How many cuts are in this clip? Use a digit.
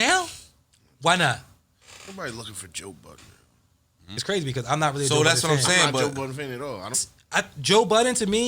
2